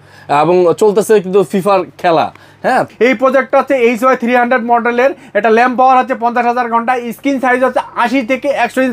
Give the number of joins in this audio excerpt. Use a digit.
1